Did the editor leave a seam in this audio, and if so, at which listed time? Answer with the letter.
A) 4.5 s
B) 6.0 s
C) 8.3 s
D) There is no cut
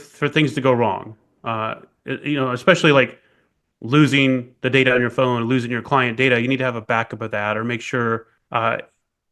C